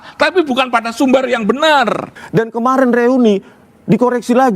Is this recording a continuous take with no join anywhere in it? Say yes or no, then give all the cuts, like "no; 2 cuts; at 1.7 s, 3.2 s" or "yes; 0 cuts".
no; 1 cut; at 2.2 s